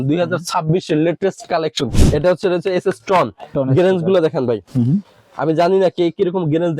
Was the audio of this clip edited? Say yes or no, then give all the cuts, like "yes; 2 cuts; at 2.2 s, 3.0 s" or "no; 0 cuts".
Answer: yes; 1 cut; at 1.9 s